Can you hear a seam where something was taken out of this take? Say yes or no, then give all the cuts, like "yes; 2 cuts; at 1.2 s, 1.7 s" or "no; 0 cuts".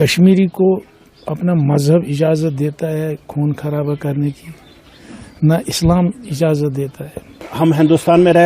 yes; 1 cut; at 7.5 s